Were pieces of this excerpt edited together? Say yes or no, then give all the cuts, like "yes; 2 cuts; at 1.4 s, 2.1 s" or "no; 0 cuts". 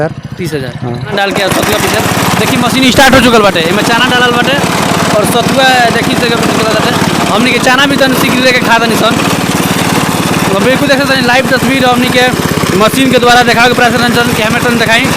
yes; 1 cut; at 1.1 s